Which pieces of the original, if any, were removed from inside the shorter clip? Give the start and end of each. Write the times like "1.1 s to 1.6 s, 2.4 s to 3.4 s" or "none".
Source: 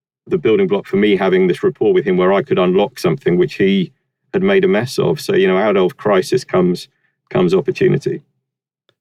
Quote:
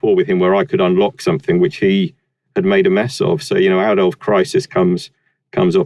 none